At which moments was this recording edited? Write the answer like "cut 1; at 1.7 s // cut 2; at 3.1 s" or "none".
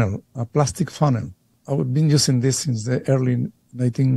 none